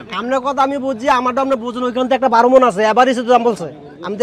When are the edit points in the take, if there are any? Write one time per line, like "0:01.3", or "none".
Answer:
none